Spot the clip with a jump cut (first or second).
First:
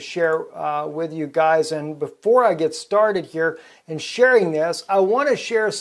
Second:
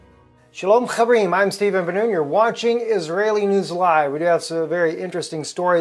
first